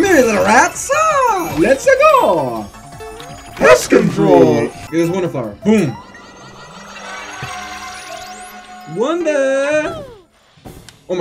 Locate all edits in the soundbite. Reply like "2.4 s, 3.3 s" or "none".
4.8 s